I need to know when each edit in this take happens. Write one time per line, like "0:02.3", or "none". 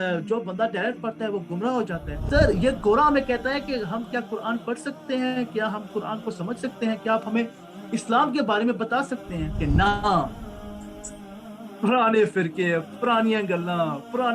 0:02.1
0:09.6